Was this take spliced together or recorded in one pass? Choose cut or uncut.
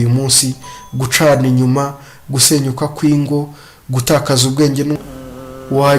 cut